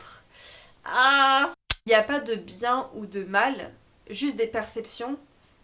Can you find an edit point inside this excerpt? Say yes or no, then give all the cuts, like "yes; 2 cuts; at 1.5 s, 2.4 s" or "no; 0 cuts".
yes; 1 cut; at 1.5 s